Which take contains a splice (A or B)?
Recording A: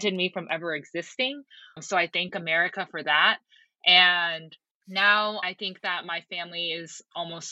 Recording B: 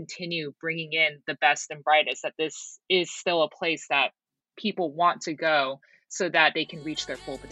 A